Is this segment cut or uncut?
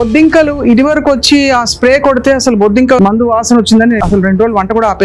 cut